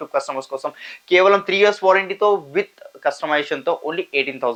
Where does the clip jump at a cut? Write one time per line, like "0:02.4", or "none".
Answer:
none